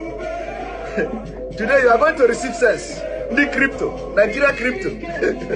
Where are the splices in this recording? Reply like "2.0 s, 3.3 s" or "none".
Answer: none